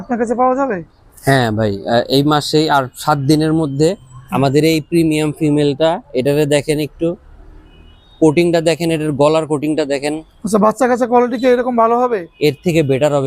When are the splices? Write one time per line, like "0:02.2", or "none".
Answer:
none